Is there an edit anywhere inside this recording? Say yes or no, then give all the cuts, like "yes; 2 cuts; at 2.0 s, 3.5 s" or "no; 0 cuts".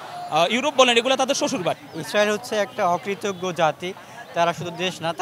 yes; 1 cut; at 1.9 s